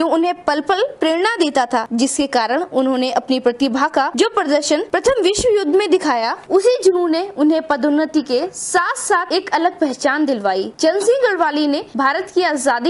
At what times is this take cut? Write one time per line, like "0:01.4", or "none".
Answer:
none